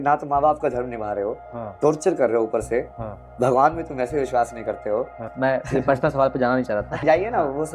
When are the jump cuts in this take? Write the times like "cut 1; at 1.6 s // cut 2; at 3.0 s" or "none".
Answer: cut 1; at 5.3 s // cut 2; at 7.0 s